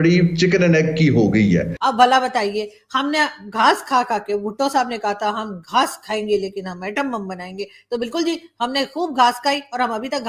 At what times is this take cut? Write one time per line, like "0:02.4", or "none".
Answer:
none